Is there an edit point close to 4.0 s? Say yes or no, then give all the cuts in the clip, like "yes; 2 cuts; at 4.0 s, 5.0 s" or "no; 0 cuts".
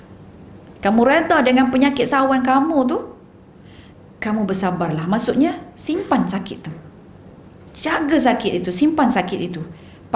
no; 0 cuts